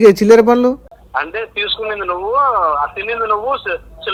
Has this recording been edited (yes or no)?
no